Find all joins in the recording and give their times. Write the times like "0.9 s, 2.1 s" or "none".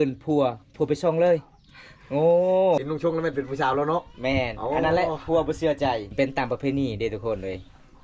2.8 s, 6.1 s